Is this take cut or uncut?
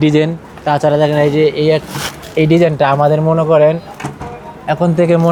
uncut